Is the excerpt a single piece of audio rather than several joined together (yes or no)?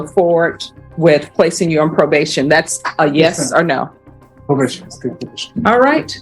yes